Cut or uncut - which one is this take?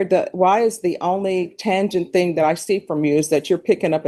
uncut